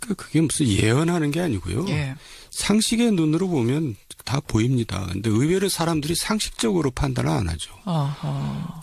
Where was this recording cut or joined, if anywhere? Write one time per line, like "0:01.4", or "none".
none